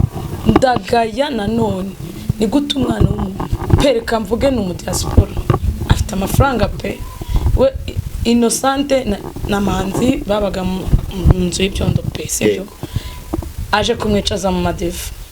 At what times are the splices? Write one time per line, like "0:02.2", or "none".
none

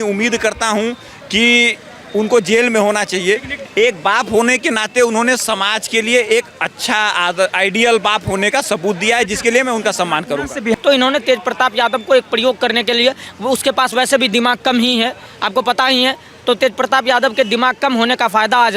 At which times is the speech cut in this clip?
0:03.6
0:10.7

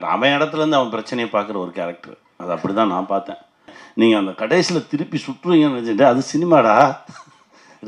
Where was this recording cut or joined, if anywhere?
0:03.8

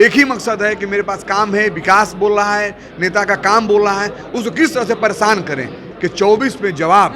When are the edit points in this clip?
0:05.9

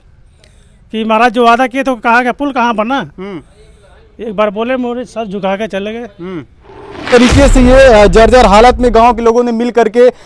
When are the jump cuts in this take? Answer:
0:07.1

